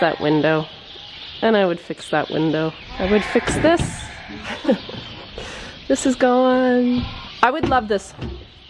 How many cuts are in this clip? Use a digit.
2